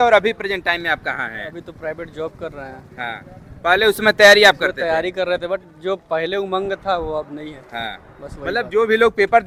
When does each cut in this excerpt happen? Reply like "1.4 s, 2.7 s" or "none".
none